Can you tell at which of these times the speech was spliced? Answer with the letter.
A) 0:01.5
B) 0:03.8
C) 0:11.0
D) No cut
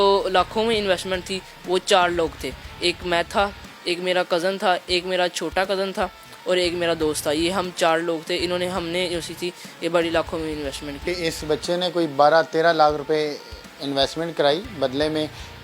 C